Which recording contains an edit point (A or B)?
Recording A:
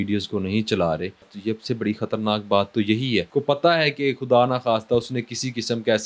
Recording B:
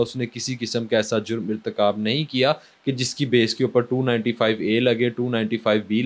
A